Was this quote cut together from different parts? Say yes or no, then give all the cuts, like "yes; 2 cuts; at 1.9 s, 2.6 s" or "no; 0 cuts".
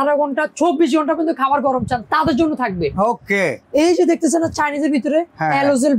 no; 0 cuts